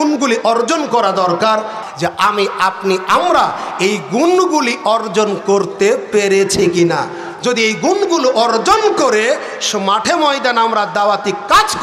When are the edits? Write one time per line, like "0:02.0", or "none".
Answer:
0:01.8